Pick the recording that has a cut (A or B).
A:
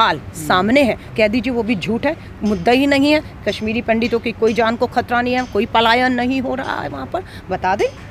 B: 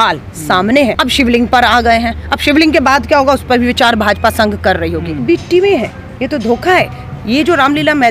B